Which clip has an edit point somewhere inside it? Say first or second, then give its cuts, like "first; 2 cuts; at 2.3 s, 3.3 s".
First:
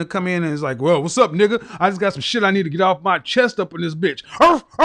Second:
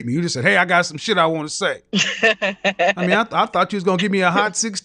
second; 1 cut; at 1.8 s